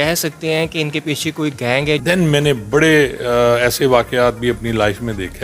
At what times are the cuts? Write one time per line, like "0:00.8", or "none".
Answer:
0:02.0